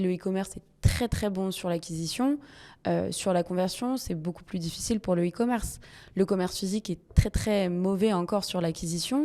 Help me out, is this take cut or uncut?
uncut